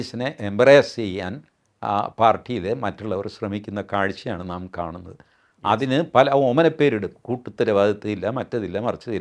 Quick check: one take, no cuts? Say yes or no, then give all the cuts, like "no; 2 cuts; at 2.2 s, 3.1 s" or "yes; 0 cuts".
yes; 0 cuts